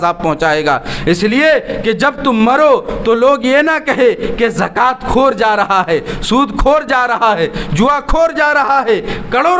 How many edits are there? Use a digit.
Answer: 0